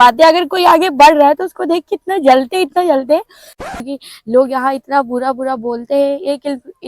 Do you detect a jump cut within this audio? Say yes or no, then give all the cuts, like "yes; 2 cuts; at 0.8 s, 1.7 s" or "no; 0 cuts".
yes; 1 cut; at 3.6 s